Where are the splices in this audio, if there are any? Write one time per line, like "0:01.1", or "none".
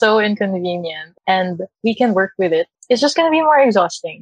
0:01.0
0:01.7
0:02.8